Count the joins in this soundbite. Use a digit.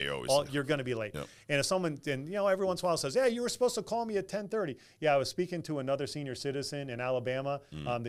0